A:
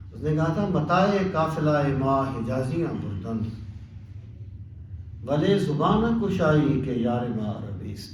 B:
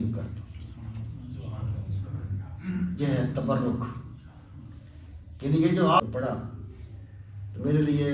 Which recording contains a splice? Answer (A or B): B